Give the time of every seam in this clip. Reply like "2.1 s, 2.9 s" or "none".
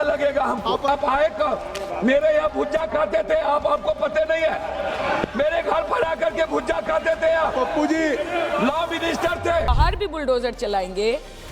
0.9 s, 9.7 s